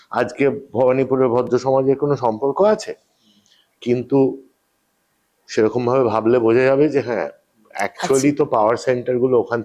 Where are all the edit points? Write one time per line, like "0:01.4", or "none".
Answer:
none